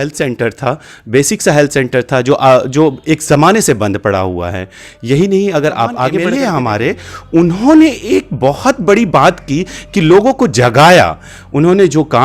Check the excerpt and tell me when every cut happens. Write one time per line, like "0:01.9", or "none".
0:06.2